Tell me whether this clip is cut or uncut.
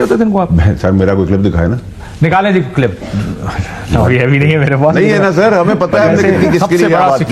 uncut